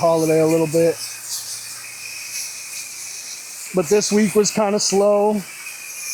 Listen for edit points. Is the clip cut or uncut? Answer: uncut